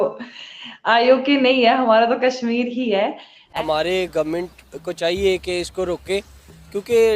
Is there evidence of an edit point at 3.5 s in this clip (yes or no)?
yes